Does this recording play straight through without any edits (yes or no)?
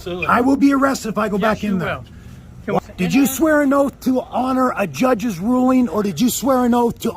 no